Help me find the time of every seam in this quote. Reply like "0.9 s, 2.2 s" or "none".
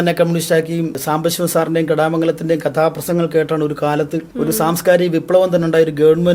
1.0 s, 4.2 s